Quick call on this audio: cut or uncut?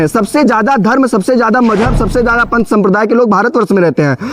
uncut